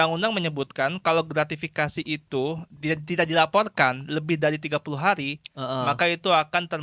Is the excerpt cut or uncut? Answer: uncut